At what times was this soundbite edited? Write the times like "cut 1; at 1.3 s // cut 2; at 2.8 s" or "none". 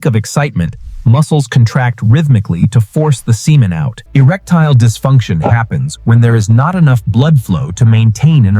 cut 1; at 4.0 s